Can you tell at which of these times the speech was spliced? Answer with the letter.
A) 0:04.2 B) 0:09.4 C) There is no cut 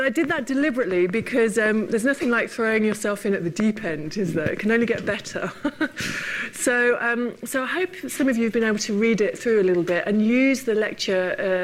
B